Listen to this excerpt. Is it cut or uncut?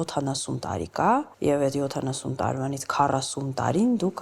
cut